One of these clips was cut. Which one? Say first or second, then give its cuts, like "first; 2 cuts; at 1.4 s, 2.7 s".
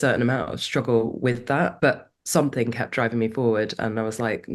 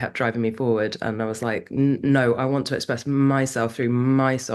first; 1 cut; at 1.7 s